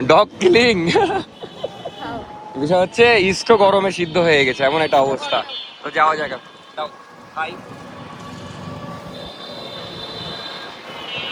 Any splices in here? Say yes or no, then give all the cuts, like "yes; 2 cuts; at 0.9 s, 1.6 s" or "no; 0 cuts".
no; 0 cuts